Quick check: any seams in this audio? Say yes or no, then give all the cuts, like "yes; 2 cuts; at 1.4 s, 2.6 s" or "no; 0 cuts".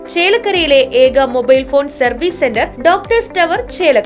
no; 0 cuts